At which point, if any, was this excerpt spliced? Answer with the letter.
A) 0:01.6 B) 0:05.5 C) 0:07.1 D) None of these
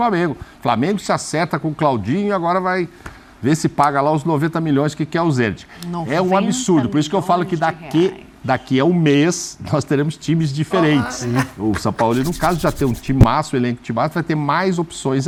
D